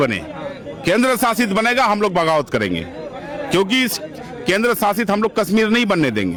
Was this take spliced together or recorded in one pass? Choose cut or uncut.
uncut